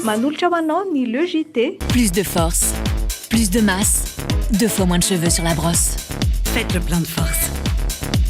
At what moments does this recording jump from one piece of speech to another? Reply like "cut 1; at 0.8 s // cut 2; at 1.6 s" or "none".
cut 1; at 1.8 s